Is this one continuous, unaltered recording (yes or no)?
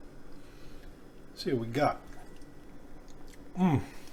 yes